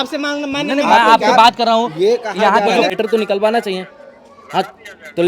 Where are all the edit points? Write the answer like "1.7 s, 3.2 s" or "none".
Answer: 2.9 s